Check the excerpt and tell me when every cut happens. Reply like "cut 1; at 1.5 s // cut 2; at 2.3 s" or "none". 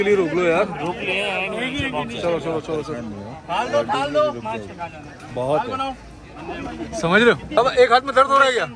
cut 1; at 7.5 s